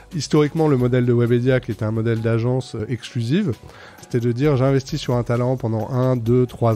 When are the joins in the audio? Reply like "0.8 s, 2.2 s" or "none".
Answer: 2.8 s, 4.1 s